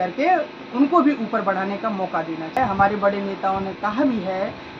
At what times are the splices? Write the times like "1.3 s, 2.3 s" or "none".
2.6 s